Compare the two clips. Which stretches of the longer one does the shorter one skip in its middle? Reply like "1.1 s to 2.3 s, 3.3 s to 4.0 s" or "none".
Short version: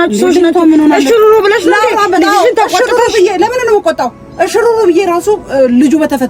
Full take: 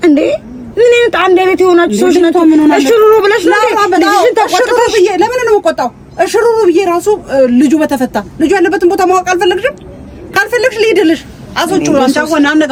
none